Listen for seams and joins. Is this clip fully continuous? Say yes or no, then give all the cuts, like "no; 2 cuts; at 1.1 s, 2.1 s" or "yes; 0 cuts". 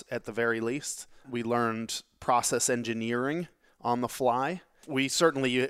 no; 2 cuts; at 1.3 s, 4.8 s